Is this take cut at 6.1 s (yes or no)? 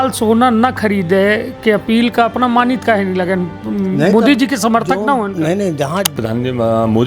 yes